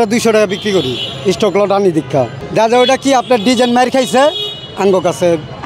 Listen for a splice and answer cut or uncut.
uncut